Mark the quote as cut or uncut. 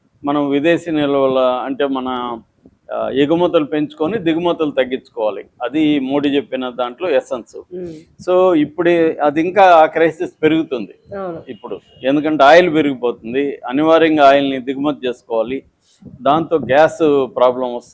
cut